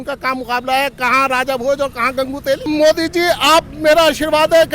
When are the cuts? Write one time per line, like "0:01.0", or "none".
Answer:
0:02.7